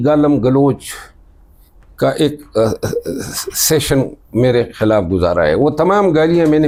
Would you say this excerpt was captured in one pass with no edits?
yes; 0 cuts

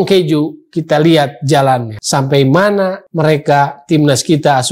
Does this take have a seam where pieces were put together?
yes; 2 cuts; at 2.0 s, 3.0 s

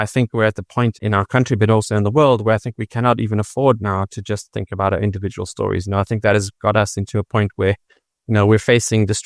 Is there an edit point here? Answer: yes; 1 cut; at 1.0 s

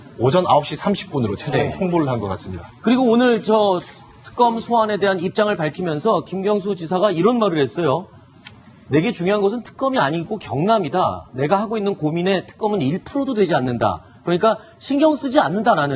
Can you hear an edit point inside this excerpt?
yes; 1 cut; at 2.6 s

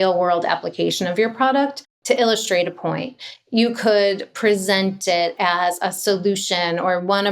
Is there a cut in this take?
yes; 1 cut; at 1.9 s

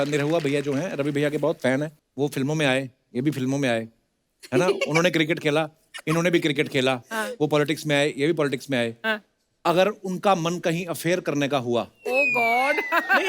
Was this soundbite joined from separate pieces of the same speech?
yes; 1 cut; at 2.0 s

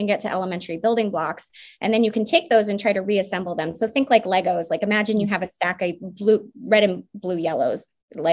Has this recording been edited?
no; 0 cuts

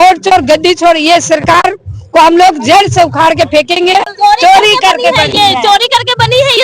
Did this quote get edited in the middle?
yes; 1 cut; at 4.1 s

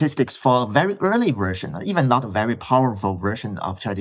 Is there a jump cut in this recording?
no; 0 cuts

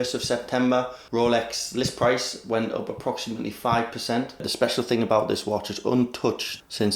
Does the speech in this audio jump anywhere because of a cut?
yes; 2 cuts; at 1.0 s, 4.5 s

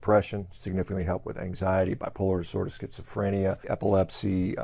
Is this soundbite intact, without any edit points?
no; 1 cut; at 3.6 s

